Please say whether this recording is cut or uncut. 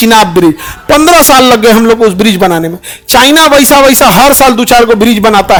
uncut